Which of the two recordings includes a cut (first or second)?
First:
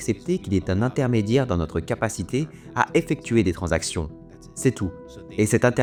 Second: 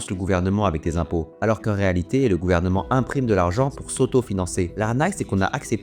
second